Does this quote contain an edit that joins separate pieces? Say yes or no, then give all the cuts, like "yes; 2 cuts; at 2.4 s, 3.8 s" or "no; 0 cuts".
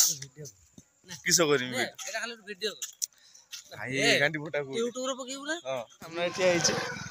yes; 1 cut; at 6.2 s